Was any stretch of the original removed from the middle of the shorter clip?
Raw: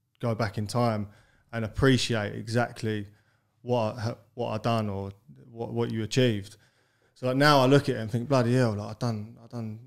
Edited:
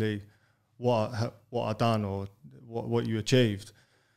no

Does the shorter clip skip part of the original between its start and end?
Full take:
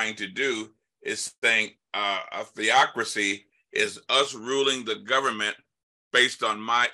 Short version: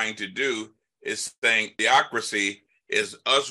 yes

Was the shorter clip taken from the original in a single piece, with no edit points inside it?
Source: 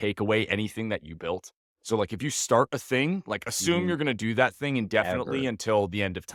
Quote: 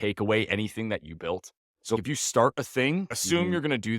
no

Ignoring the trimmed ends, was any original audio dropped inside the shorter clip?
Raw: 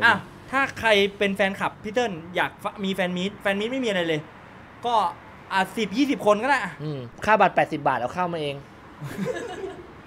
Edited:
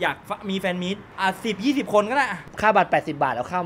yes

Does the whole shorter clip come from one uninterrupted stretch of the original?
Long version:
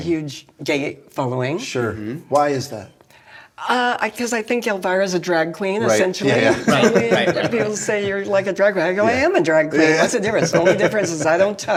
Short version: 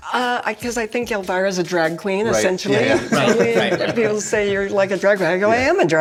yes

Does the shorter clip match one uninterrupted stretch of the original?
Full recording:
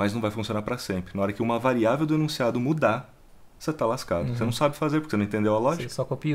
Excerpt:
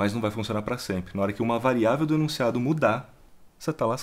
yes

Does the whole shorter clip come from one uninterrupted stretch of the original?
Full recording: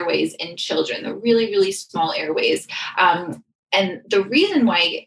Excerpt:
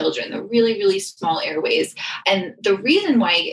no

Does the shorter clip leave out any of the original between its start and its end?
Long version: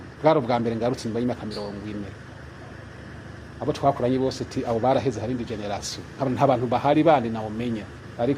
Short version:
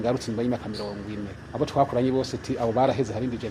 yes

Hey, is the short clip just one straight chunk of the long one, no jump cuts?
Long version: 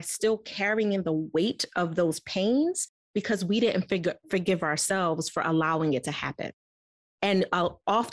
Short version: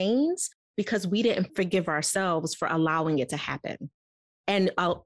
no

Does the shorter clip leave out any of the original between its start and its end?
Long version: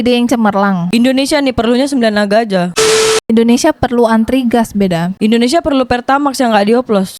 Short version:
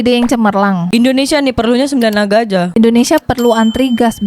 yes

